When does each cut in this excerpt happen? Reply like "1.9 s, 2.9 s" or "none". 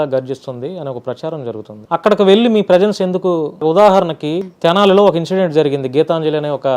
1.7 s, 3.6 s, 4.5 s

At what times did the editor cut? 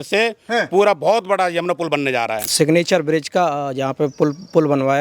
2.5 s

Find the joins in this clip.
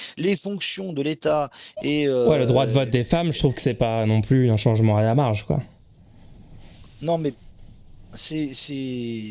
none

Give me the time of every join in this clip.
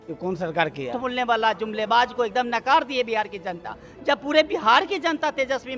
1.4 s

